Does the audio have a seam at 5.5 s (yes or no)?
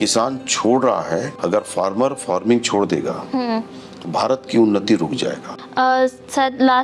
yes